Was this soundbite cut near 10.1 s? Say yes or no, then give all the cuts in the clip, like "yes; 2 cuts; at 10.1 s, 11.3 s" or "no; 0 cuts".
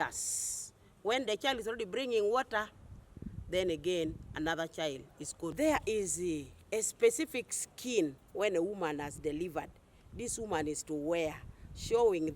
no; 1 cut; at 5.5 s